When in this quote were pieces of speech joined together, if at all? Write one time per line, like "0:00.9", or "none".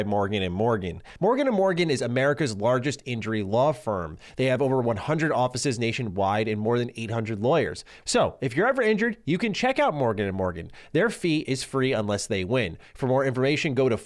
0:01.0
0:07.9